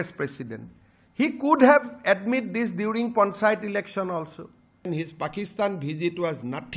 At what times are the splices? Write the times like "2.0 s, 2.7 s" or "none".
4.9 s